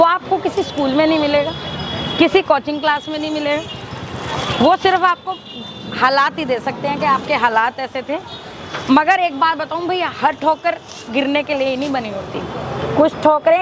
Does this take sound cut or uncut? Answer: uncut